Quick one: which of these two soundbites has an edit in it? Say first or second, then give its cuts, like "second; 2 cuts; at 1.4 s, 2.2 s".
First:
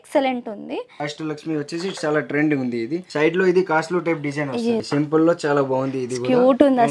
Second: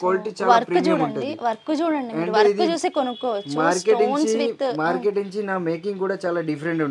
first; 3 cuts; at 1.0 s, 3.0 s, 4.8 s